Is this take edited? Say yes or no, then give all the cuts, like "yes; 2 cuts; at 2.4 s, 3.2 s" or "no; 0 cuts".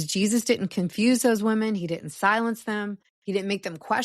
yes; 1 cut; at 3.1 s